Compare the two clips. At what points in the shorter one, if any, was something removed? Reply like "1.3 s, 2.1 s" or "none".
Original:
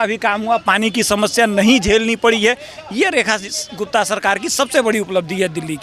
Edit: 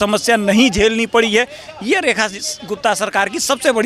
none